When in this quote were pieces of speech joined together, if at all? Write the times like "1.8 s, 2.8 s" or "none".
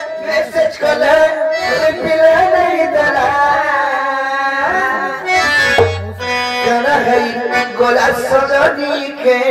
none